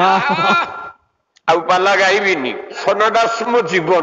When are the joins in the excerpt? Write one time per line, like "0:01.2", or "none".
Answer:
0:02.8